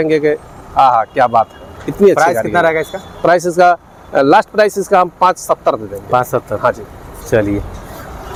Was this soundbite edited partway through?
no; 0 cuts

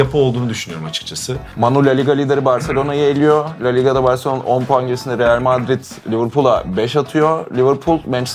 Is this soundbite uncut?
no; 1 cut; at 1.5 s

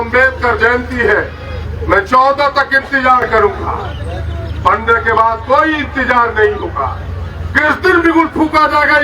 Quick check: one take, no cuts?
yes; 0 cuts

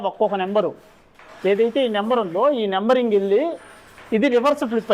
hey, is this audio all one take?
yes; 0 cuts

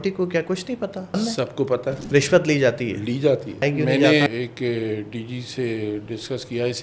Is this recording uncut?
no; 4 cuts; at 1.2 s, 2.0 s, 3.6 s, 4.3 s

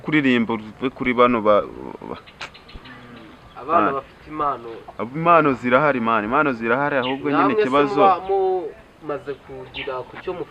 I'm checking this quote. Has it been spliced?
no; 0 cuts

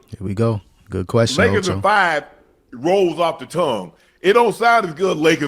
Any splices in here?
no; 0 cuts

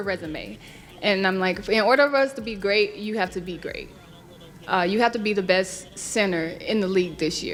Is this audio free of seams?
yes; 0 cuts

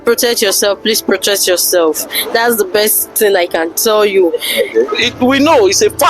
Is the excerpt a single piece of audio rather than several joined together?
no; 1 cut; at 4.9 s

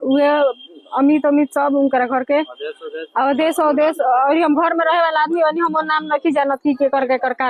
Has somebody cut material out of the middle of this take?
no; 0 cuts

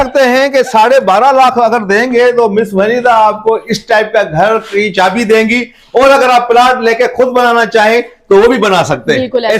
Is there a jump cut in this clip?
no; 0 cuts

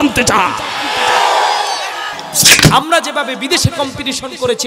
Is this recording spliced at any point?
yes; 1 cut; at 2.5 s

